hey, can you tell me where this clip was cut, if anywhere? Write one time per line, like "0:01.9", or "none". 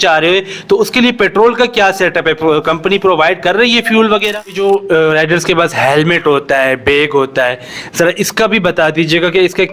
0:04.6